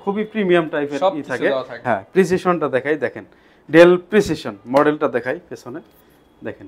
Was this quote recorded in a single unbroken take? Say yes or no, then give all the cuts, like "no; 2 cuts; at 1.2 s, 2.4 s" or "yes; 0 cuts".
no; 1 cut; at 1.7 s